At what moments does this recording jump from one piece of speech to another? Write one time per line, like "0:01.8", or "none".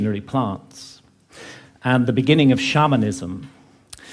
none